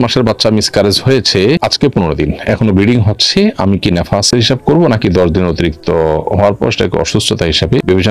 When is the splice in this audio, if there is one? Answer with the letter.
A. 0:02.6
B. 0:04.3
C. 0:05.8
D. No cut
D